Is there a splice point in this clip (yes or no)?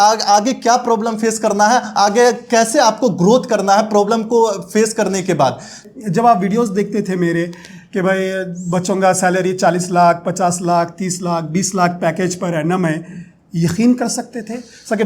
yes